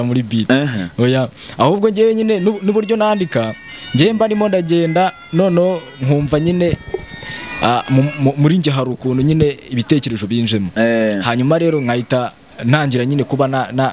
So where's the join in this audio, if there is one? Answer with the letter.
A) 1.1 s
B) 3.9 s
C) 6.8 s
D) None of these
D